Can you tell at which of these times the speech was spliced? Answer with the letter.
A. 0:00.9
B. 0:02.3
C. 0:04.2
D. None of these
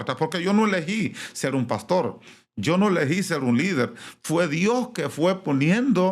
D